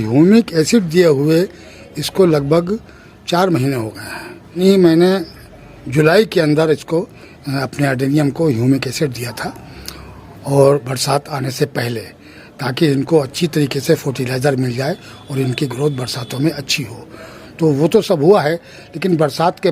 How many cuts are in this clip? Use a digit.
1